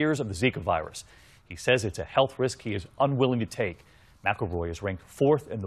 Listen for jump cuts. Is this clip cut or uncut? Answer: cut